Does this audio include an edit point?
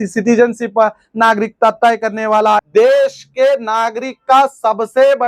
yes; 1 cut; at 2.6 s

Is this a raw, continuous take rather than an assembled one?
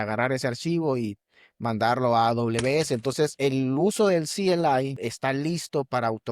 no; 2 cuts; at 3.3 s, 4.9 s

